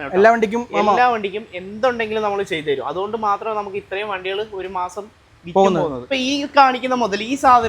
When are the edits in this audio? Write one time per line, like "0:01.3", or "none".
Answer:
0:06.0